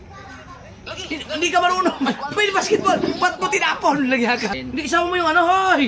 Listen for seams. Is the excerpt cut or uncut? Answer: cut